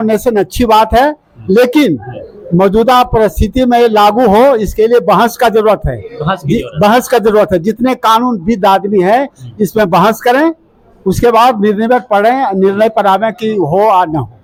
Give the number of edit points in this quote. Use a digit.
0